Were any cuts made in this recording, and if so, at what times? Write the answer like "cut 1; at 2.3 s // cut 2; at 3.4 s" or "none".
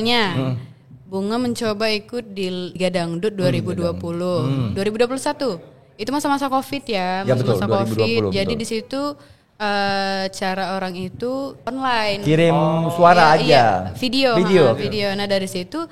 cut 1; at 2.7 s // cut 2; at 11.6 s